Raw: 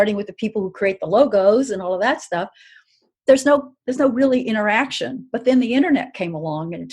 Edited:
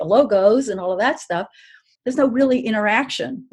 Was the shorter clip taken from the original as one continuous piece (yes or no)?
no